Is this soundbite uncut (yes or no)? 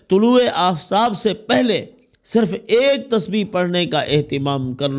yes